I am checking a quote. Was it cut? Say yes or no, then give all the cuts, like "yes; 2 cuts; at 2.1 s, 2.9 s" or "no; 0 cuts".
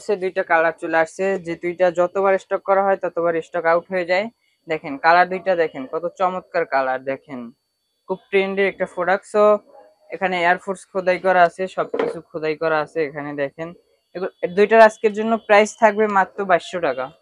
no; 0 cuts